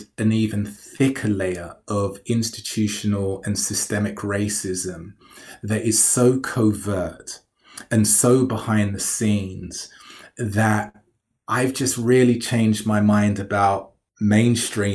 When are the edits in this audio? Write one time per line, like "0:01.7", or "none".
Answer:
0:14.0